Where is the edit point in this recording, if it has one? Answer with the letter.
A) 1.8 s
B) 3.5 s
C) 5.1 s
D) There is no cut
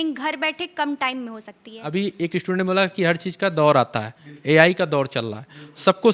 A